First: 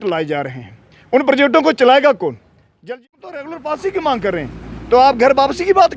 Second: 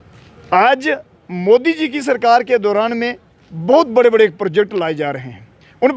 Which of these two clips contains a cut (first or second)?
first